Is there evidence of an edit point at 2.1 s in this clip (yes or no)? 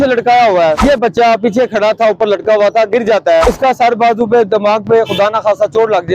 no